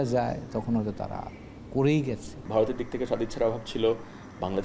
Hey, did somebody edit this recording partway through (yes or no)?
yes